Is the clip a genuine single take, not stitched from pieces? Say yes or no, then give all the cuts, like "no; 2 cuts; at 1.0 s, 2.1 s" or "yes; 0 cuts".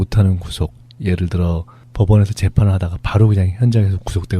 no; 1 cut; at 1.4 s